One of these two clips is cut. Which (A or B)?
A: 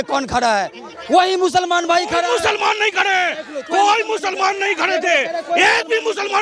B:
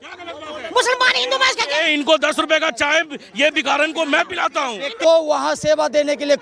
B